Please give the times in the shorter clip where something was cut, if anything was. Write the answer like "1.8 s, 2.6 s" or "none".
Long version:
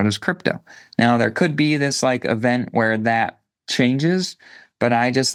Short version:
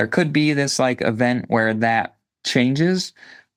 none